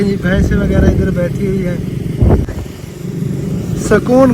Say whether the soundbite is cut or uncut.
cut